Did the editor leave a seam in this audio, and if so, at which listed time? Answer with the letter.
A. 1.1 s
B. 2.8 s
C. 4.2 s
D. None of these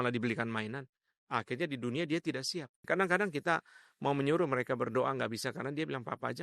B